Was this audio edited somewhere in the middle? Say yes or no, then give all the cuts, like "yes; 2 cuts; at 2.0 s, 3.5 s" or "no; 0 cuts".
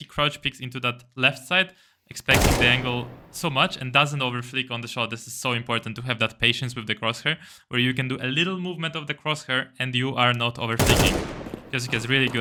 no; 0 cuts